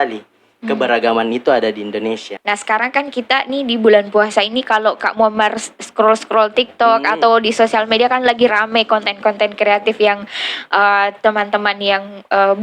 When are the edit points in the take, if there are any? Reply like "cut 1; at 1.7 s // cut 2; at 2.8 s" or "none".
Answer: cut 1; at 2.3 s